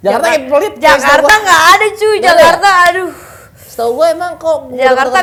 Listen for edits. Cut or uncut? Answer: uncut